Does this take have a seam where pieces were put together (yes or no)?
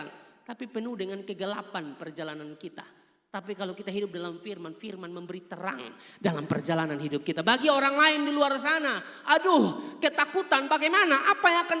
no